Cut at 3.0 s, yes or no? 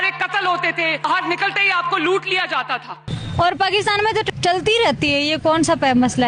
yes